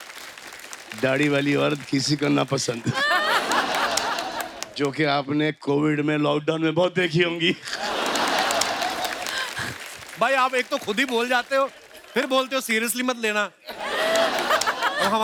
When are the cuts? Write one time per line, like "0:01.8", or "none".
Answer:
none